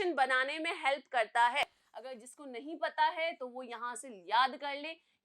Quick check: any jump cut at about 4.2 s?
no; 1 cut; at 1.8 s

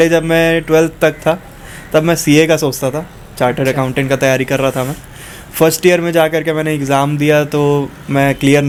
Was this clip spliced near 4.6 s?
no; 0 cuts

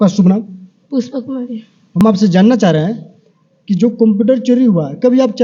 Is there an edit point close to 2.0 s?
yes; 1 cut; at 2.0 s

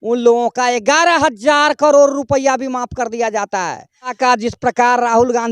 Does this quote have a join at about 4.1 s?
yes; 1 cut; at 4.1 s

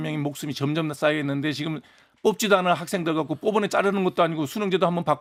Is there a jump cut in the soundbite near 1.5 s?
no; 0 cuts

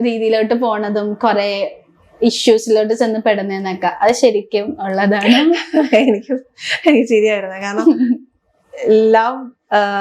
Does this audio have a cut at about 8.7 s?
no; 0 cuts

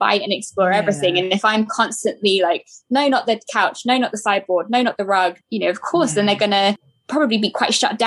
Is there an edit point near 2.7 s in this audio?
no; 2 cuts; at 5.4 s, 6.9 s

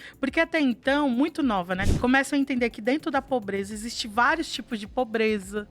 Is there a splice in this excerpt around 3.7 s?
no; 1 cut; at 1.8 s

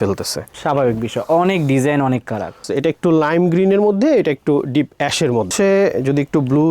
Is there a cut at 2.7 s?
yes; 2 cuts; at 2.7 s, 5.5 s

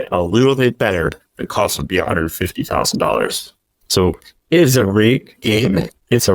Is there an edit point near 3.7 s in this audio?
no; 0 cuts

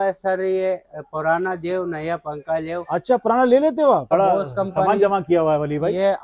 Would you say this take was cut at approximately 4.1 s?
yes; 1 cut; at 4.1 s

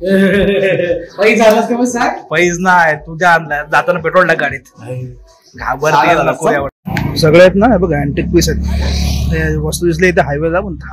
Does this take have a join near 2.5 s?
no; 1 cut; at 6.7 s

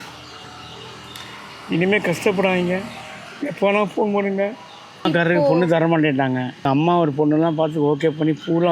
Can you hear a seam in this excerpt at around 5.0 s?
yes; 2 cuts; at 5.0 s, 6.7 s

